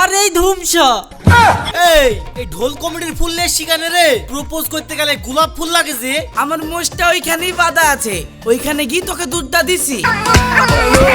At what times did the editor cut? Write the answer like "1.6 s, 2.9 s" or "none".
1.7 s, 6.3 s, 10.0 s